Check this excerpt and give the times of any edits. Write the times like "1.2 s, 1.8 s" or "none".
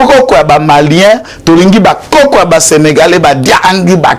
none